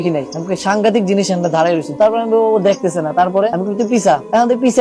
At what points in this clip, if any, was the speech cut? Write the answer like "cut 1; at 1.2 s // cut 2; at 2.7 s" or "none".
cut 1; at 1.9 s // cut 2; at 3.5 s